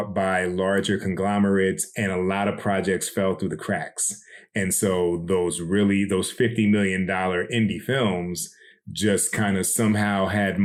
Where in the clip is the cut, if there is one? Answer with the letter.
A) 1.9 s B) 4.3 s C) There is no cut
C